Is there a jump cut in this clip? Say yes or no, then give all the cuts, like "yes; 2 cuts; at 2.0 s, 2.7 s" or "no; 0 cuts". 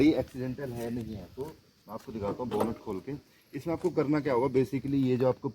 no; 0 cuts